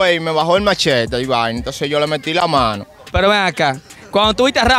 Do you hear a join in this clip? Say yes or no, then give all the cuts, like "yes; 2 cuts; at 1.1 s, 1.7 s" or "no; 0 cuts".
yes; 1 cut; at 3.0 s